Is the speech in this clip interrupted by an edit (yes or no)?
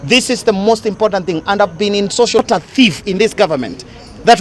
yes